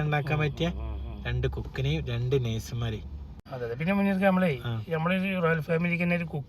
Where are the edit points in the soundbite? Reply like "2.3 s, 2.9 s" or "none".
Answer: 3.4 s